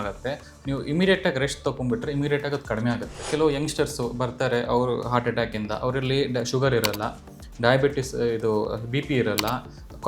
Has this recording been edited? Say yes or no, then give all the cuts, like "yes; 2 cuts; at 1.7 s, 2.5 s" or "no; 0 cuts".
yes; 1 cut; at 3.2 s